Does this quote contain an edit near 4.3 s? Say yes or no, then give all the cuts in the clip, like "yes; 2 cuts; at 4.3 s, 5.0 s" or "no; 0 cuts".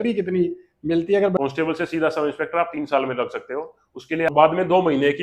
yes; 2 cuts; at 1.4 s, 4.3 s